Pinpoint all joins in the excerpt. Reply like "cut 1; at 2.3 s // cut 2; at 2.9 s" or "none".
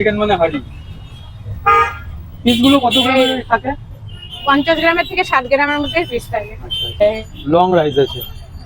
cut 1; at 7.0 s